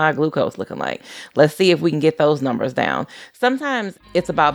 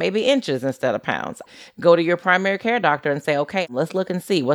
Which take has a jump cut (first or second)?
second